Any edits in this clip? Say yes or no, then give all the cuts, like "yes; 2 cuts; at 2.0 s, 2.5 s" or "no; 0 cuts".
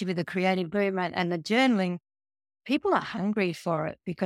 no; 0 cuts